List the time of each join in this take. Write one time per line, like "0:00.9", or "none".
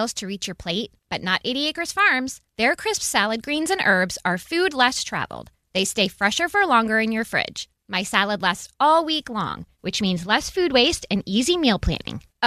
none